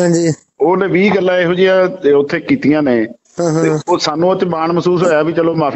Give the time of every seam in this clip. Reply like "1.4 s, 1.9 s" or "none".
none